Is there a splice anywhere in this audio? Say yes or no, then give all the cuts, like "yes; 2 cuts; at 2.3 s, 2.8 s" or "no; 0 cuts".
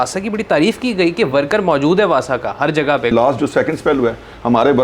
yes; 1 cut; at 3.1 s